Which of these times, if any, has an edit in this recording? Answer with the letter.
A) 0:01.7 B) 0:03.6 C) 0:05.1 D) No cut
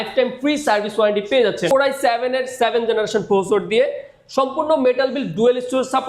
A